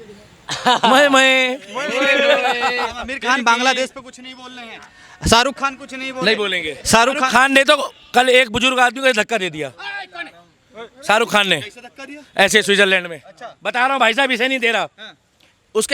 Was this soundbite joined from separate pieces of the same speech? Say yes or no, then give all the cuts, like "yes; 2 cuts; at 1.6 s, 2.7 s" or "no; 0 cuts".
no; 0 cuts